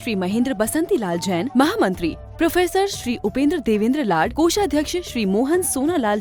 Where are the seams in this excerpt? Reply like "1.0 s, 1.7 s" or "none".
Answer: none